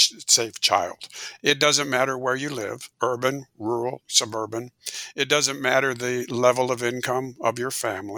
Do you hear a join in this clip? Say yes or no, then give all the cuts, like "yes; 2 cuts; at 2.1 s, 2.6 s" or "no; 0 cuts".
yes; 2 cuts; at 1.2 s, 2.8 s